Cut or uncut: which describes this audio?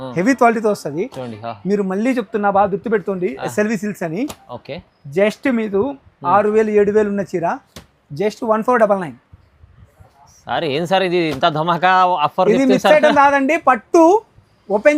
uncut